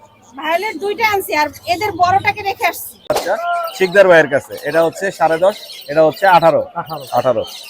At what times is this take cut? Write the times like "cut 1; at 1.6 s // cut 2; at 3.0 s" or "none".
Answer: cut 1; at 3.1 s